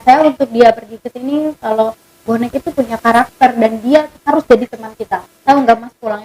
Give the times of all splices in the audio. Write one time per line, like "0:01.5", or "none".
0:05.3